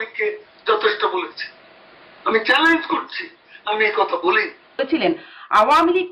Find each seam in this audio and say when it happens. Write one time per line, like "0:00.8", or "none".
0:04.7

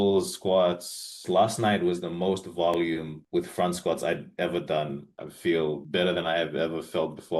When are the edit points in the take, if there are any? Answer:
0:01.1
0:05.2

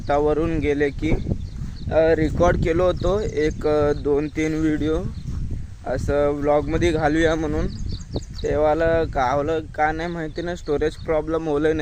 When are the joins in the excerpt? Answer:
none

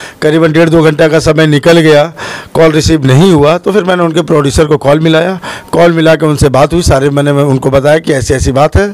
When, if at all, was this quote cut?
none

